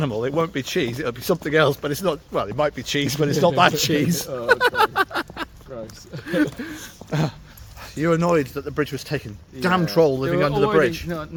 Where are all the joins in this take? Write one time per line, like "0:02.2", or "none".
none